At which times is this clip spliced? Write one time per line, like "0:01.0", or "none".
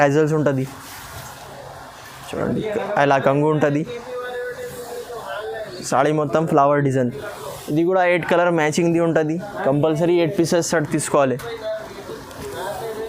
none